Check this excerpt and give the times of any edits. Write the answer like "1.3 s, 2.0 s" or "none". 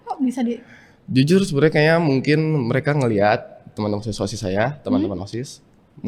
none